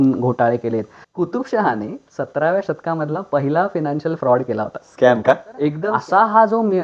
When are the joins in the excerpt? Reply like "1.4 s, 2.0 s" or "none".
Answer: 1.0 s, 5.8 s